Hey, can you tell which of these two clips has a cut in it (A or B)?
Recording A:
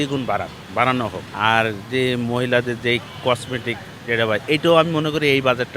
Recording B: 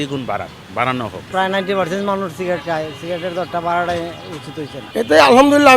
B